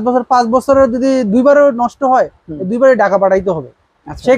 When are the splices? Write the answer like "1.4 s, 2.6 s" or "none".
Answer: none